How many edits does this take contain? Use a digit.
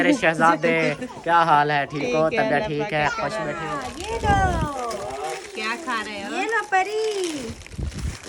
1